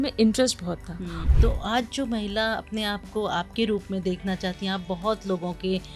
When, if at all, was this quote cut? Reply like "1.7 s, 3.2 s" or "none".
1.2 s